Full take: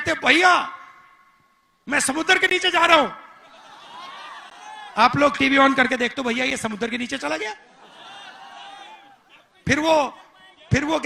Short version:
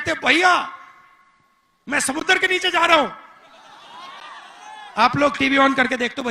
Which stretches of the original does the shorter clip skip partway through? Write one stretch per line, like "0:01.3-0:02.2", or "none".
none